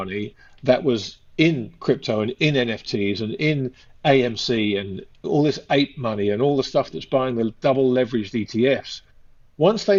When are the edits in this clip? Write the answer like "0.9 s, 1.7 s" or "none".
none